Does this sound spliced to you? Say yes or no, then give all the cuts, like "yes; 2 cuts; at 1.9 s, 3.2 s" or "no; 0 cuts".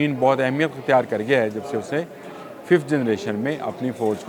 no; 0 cuts